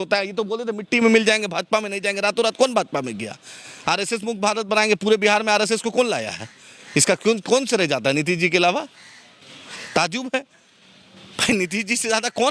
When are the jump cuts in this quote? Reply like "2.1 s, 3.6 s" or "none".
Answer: none